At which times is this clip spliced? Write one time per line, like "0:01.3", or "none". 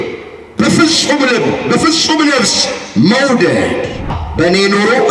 0:04.2